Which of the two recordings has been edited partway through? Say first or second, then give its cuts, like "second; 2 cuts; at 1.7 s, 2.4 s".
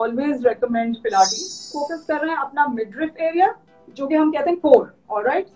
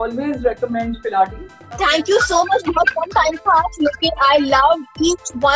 first; 1 cut; at 1.6 s